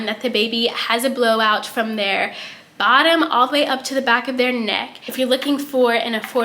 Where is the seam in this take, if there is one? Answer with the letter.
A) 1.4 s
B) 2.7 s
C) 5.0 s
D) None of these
C